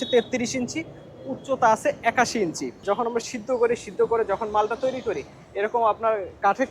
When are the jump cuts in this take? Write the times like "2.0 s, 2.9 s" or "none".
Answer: 2.9 s